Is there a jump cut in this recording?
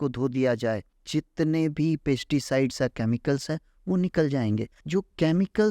yes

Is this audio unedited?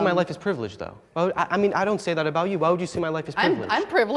no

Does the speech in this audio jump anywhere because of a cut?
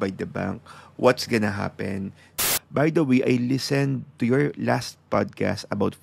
yes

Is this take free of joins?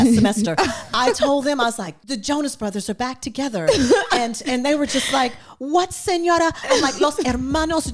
no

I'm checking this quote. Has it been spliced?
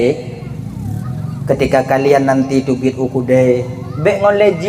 yes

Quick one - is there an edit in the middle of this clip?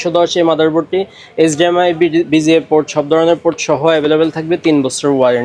no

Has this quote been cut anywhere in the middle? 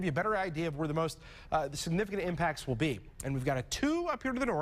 no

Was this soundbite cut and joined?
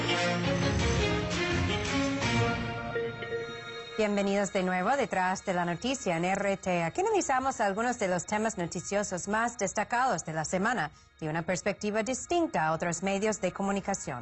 no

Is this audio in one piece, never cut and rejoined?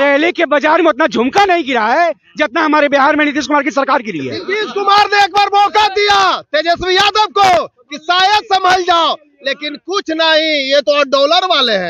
yes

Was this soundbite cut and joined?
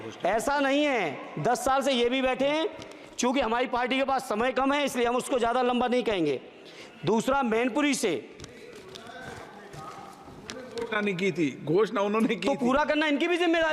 no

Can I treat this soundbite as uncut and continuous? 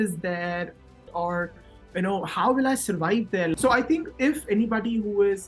no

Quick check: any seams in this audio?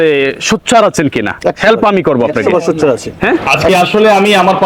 yes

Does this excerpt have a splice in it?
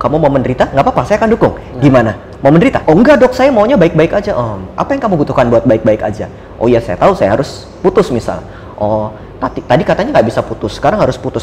yes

